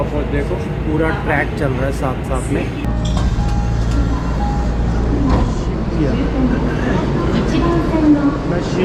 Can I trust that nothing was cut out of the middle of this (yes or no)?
yes